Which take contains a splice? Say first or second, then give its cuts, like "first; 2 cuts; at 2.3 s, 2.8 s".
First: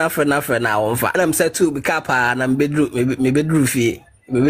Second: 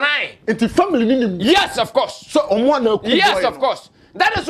first; 1 cut; at 1.1 s